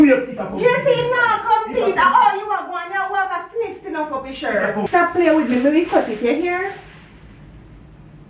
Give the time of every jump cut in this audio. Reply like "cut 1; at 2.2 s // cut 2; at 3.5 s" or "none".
cut 1; at 4.8 s